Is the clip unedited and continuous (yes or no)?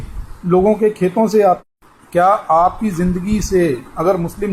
no